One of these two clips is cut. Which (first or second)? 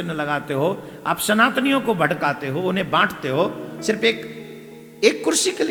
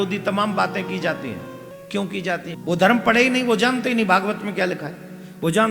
second